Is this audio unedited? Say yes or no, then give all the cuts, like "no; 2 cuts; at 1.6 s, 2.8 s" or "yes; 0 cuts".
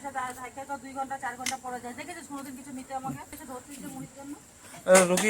no; 1 cut; at 3.3 s